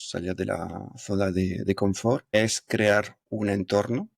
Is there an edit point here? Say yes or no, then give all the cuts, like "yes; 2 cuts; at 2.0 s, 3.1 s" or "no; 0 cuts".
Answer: yes; 2 cuts; at 2.3 s, 3.2 s